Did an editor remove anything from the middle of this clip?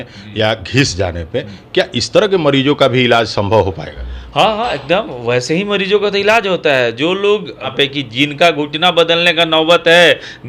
yes; 1 cut; at 7.7 s

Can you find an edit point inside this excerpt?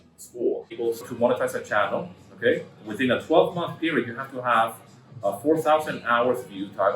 yes; 1 cut; at 1.1 s

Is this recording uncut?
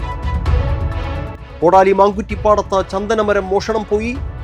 no; 1 cut; at 1.5 s

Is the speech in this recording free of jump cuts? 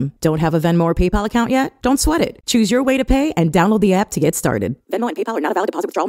yes; 0 cuts

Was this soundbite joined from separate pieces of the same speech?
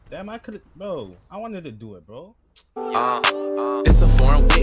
yes; 1 cut; at 2.7 s

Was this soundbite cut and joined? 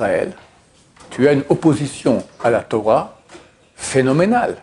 no; 0 cuts

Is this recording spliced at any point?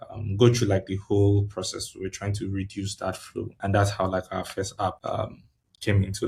yes; 1 cut; at 5.0 s

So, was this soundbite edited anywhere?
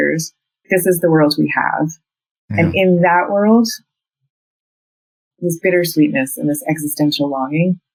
no; 0 cuts

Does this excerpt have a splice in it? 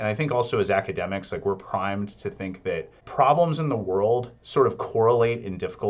yes; 1 cut; at 3.0 s

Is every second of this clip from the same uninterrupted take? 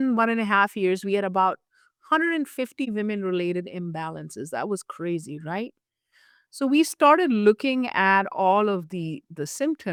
yes; 0 cuts

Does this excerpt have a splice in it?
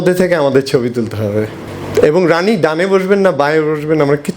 yes; 1 cut; at 1.6 s

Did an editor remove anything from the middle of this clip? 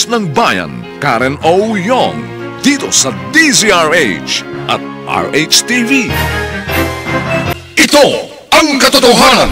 yes; 1 cut; at 7.5 s

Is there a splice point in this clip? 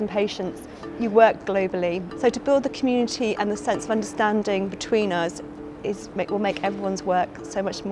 yes; 1 cut; at 2.1 s

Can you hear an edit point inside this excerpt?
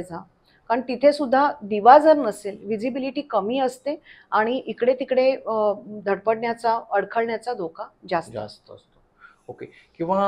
no; 0 cuts

